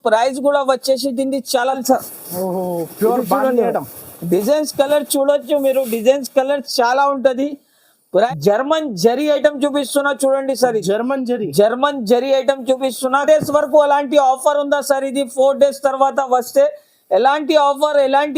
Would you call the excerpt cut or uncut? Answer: cut